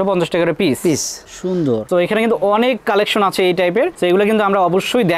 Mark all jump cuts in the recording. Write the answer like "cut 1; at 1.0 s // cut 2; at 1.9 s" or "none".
cut 1; at 1.8 s